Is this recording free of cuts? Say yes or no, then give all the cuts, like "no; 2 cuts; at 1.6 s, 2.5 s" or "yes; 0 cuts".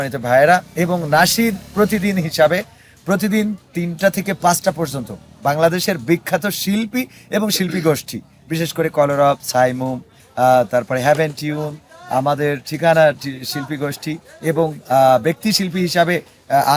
yes; 0 cuts